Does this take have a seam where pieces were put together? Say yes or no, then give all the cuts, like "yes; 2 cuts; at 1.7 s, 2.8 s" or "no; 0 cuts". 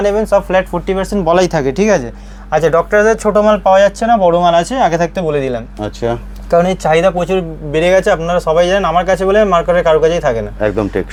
no; 0 cuts